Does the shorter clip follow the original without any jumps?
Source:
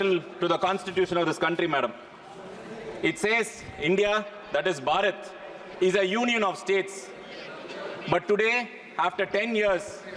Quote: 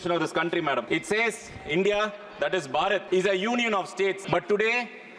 no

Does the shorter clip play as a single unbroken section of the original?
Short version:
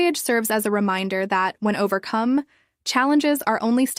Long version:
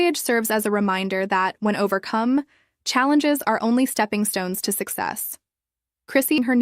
yes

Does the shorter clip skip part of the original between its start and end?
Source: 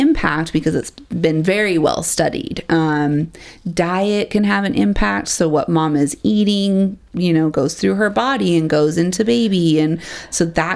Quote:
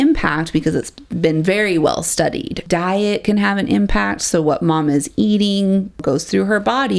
yes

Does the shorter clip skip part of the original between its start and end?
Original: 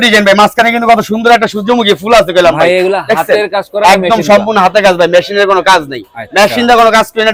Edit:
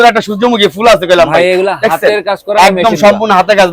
no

